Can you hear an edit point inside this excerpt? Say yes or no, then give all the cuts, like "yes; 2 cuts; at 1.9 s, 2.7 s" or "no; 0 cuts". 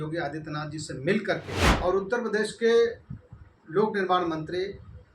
yes; 1 cut; at 1.6 s